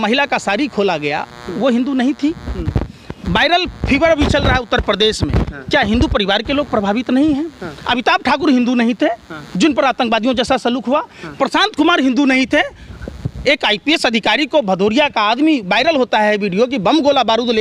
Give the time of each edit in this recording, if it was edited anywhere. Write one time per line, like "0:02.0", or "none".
none

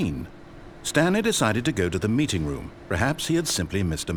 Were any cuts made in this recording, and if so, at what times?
none

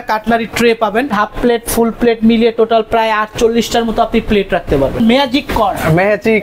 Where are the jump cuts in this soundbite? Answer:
0:01.1
0:05.0

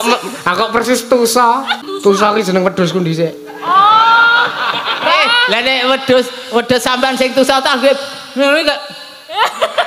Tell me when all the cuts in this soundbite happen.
0:01.8

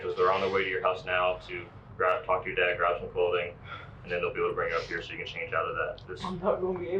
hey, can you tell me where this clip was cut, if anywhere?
none

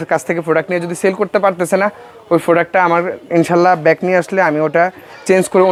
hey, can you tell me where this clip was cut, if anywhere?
none

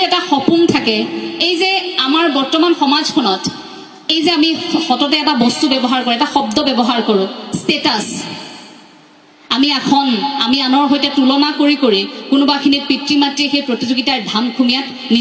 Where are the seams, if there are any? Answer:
none

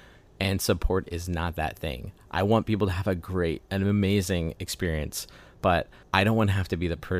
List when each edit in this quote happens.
0:06.0

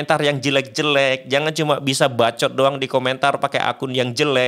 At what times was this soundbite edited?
none

